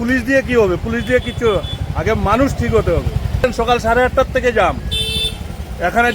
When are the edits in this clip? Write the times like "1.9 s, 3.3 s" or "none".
3.4 s